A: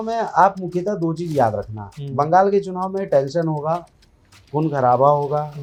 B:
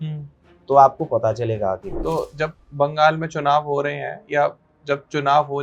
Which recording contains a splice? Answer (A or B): B